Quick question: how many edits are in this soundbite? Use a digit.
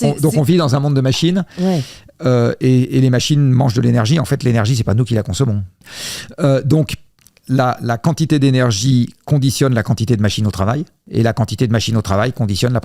1